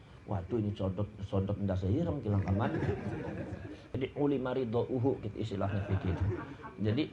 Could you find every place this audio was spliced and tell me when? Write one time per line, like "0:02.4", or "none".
0:04.0

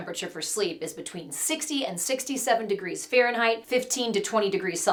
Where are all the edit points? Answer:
none

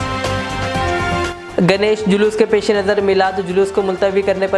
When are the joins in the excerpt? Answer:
0:01.2

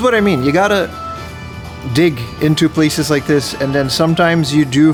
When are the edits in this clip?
none

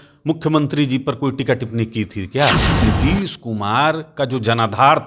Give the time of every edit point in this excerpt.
0:02.8

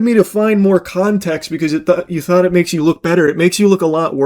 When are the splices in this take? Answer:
none

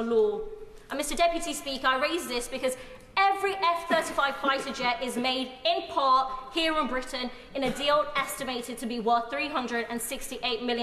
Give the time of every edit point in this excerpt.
none

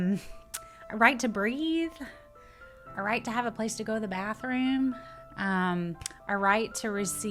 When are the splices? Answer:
none

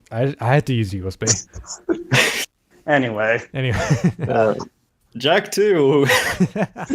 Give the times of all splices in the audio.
0:02.5

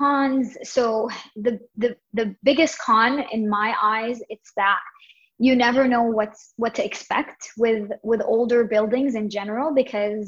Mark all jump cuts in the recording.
none

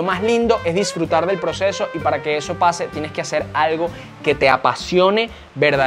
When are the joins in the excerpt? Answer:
none

